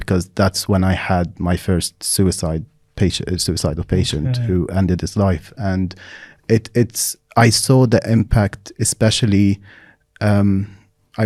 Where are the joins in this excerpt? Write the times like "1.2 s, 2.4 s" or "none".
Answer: none